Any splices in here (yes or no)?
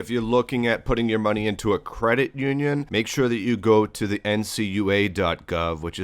yes